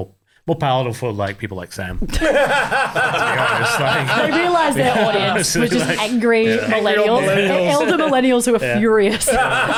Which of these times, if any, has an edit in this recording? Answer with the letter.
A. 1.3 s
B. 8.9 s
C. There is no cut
C